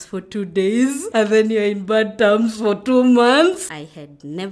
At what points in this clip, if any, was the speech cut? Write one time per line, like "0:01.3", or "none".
0:01.0
0:03.6